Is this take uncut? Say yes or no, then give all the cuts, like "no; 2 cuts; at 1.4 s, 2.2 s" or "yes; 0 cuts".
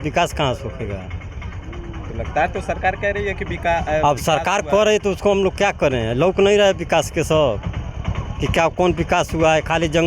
yes; 0 cuts